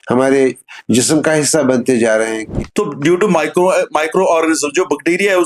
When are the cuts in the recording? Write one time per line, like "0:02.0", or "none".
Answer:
0:02.5

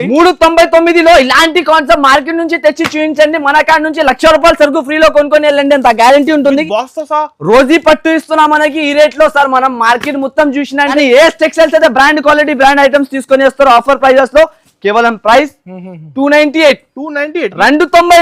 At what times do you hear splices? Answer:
0:10.9

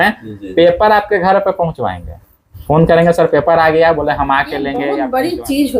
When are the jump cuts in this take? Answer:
0:04.8

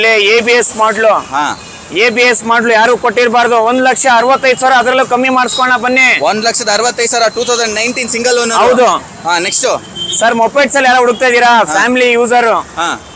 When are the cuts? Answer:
none

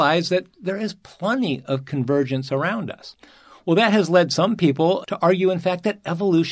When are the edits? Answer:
0:05.0

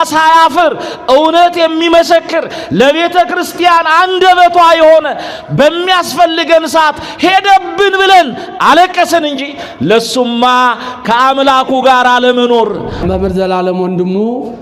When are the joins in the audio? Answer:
0:13.0

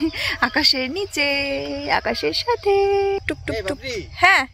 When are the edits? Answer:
0:03.2

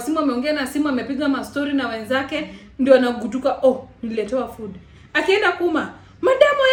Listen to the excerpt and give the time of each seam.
none

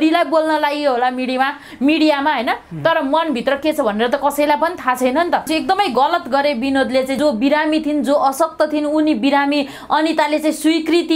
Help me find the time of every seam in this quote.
0:05.5
0:07.2

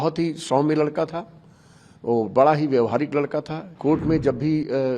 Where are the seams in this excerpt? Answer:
0:03.6

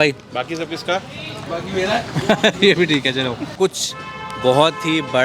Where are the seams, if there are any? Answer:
0:03.5

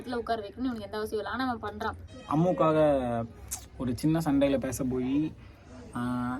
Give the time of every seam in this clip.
0:02.1

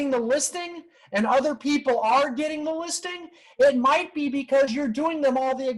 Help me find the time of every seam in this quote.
none

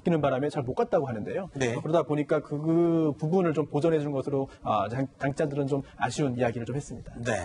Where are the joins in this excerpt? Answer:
none

